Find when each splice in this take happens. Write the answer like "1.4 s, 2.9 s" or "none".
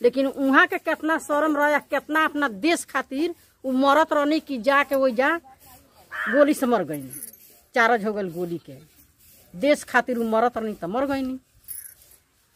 none